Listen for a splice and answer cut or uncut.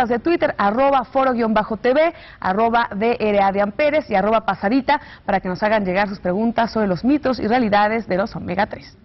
uncut